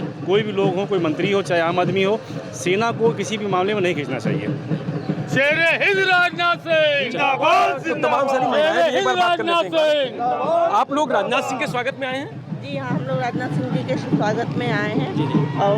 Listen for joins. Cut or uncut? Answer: uncut